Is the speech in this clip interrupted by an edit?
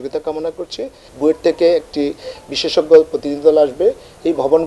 yes; 1 cut; at 1.0 s

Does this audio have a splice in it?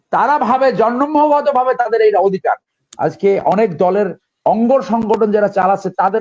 yes; 1 cut; at 2.7 s

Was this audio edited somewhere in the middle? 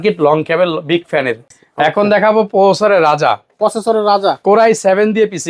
yes; 1 cut; at 1.6 s

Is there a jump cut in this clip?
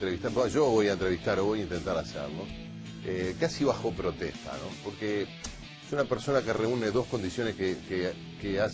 yes; 1 cut; at 3.3 s

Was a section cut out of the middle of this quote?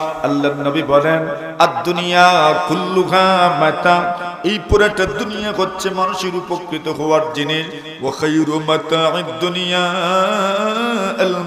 no; 0 cuts

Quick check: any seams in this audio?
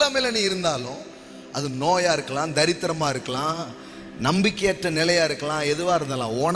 no; 0 cuts

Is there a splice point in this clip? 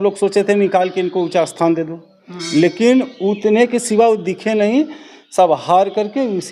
no; 0 cuts

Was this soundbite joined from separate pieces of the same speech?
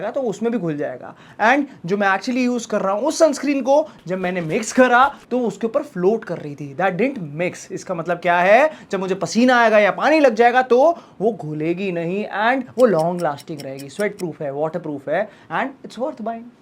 no; 0 cuts

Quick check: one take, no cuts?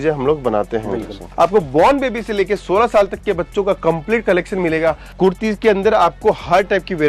no; 2 cuts; at 1.2 s, 5.1 s

